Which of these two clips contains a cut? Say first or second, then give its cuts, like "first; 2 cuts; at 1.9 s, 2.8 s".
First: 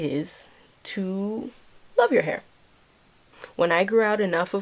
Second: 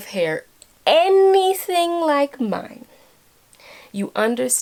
first; 1 cut; at 3.2 s